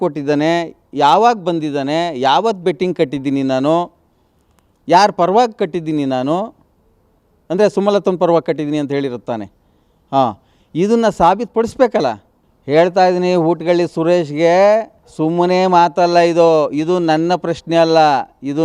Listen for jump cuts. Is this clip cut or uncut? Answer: uncut